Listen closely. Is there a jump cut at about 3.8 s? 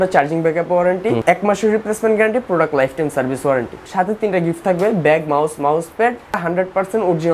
yes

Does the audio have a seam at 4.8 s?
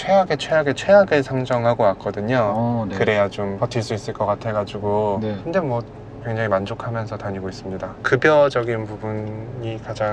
no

